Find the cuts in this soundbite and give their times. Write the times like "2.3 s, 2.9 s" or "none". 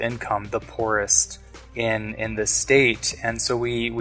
none